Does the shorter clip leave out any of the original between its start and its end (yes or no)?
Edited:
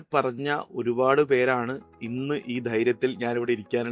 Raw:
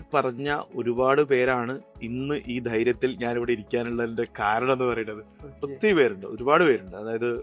no